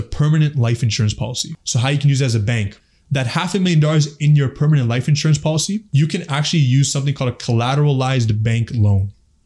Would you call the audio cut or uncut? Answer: cut